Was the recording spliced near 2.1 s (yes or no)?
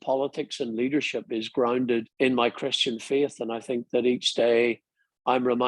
yes